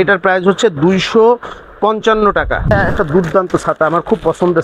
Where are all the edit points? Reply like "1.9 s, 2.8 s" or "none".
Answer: 2.7 s